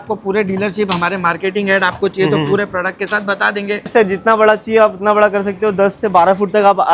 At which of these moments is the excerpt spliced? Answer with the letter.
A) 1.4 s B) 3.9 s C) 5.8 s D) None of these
B